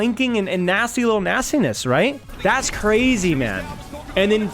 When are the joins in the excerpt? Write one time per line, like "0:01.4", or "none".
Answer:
0:02.3